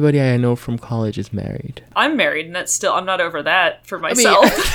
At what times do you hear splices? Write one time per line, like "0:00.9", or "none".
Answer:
0:01.8